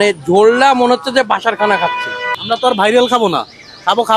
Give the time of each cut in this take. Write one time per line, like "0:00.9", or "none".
0:02.2